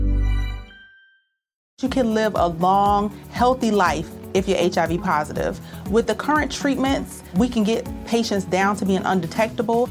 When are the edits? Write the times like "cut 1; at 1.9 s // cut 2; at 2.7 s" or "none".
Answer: cut 1; at 1.7 s

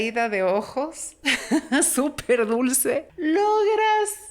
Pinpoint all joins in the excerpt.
cut 1; at 3.1 s

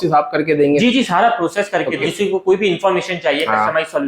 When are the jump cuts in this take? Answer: cut 1; at 2.1 s

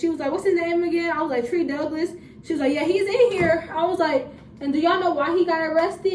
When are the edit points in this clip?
none

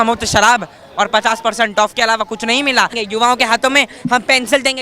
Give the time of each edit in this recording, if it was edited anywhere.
cut 1; at 3.0 s

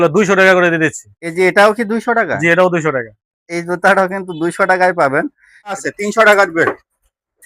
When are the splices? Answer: cut 1; at 5.8 s

